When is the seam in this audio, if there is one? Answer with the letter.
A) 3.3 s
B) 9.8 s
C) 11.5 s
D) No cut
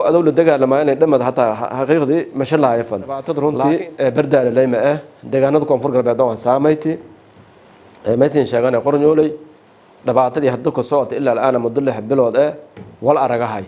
A